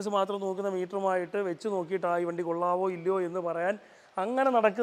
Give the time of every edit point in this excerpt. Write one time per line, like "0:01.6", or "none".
none